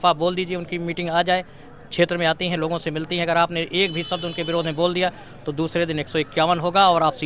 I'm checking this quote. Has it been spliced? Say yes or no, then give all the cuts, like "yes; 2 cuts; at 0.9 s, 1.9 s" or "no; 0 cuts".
no; 0 cuts